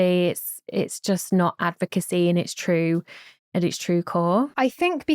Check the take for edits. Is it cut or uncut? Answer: uncut